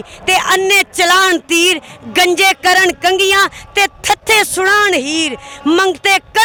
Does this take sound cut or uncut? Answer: uncut